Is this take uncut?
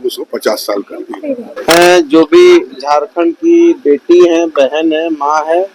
no; 1 cut; at 1.5 s

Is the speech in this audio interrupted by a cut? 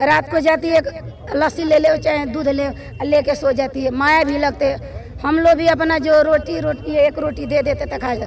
no; 0 cuts

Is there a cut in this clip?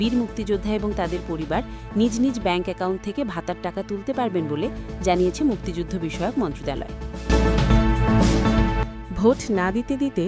yes; 2 cuts; at 7.1 s, 8.9 s

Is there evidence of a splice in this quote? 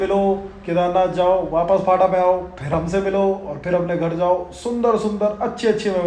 no; 0 cuts

